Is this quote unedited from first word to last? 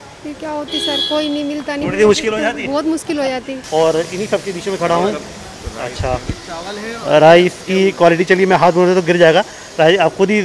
no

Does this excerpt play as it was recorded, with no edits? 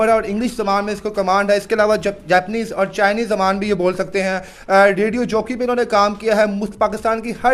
yes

